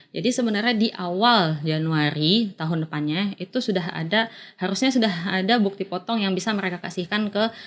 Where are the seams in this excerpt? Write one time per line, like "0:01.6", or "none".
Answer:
none